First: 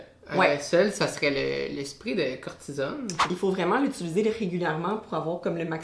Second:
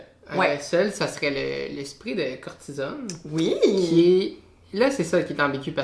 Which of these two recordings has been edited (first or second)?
first